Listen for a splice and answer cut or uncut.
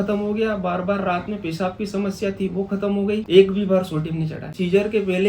cut